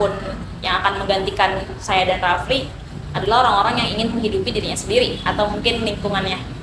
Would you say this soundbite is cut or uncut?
uncut